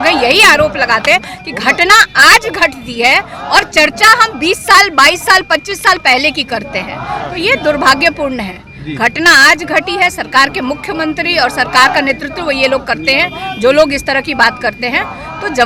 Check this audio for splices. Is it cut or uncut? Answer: uncut